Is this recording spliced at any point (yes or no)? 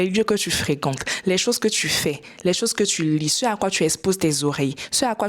no